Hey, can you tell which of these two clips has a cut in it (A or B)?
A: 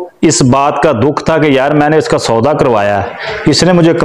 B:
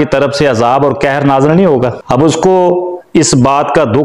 B